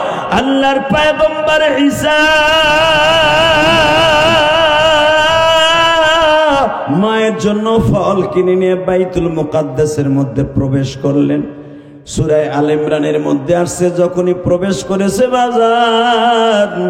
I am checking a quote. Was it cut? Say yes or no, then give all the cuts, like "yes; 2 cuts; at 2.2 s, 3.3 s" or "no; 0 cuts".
yes; 1 cut; at 6.8 s